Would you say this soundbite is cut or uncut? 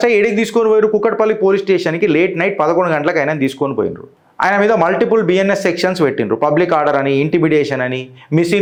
uncut